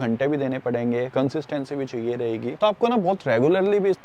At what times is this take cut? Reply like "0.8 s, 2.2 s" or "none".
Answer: 2.6 s